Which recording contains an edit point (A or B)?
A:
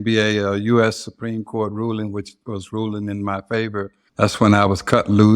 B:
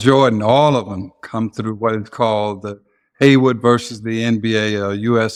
A